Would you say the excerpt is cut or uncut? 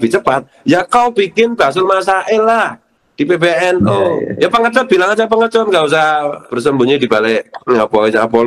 cut